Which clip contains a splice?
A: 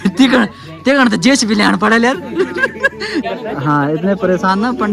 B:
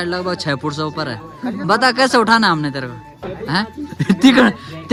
A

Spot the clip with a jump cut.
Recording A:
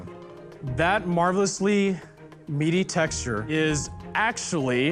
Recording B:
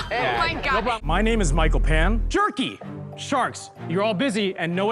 B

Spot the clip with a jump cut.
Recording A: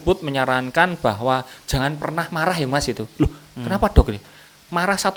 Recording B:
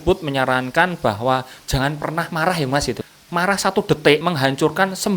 B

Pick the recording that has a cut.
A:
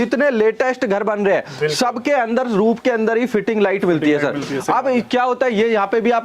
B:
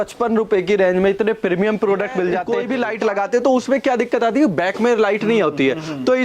B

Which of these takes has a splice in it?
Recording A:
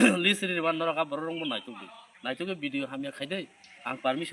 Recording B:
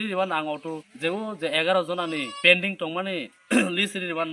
B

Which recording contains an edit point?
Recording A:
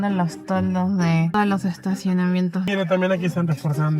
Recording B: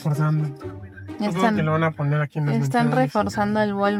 A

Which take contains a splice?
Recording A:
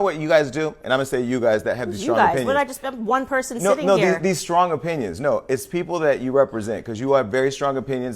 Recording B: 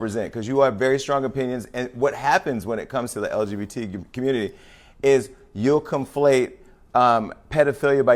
A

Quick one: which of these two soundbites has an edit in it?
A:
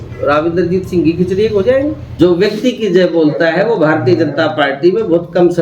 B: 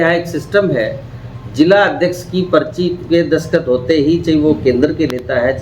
A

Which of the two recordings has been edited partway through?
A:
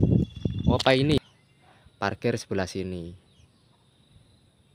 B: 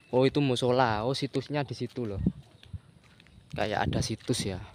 A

